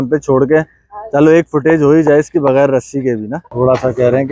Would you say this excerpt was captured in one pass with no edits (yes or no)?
no